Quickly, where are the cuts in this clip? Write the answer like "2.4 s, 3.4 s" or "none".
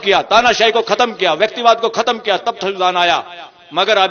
none